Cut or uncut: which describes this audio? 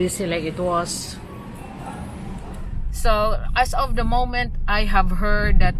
cut